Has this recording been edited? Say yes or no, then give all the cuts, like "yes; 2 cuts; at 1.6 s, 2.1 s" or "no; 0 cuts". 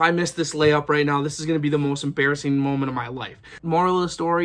yes; 1 cut; at 3.5 s